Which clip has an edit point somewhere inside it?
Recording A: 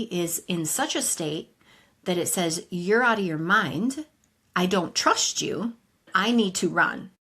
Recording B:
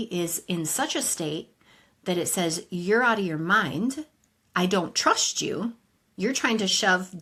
A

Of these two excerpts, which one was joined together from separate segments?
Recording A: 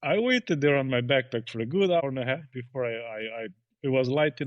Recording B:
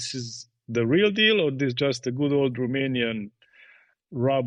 A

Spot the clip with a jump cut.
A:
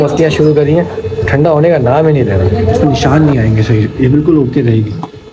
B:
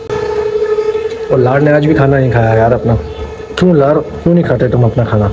A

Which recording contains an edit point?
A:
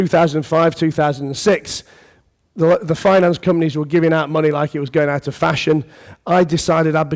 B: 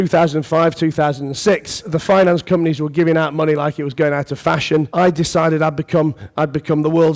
B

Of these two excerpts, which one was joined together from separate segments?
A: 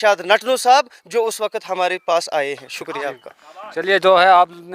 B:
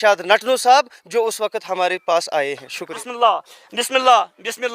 B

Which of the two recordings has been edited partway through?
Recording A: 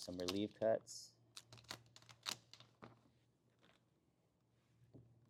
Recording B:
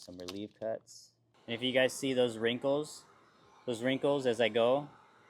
B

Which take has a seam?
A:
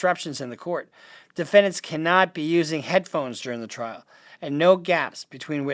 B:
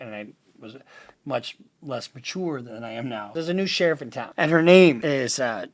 B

